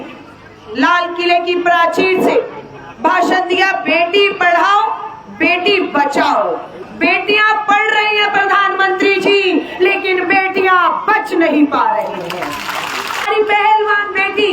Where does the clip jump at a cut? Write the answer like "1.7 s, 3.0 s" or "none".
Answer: 13.3 s